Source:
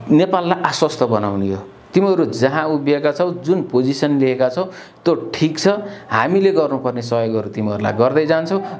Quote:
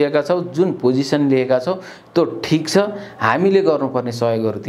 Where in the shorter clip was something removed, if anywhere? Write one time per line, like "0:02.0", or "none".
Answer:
none